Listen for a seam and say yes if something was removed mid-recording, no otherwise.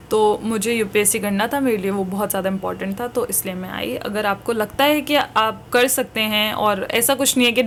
no